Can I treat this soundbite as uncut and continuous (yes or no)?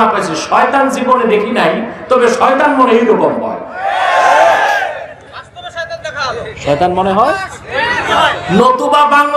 yes